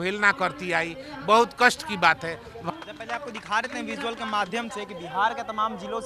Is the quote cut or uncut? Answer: uncut